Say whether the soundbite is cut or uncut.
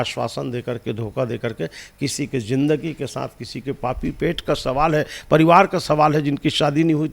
uncut